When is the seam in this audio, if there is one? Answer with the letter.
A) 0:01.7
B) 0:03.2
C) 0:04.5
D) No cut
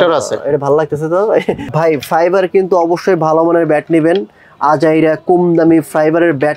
A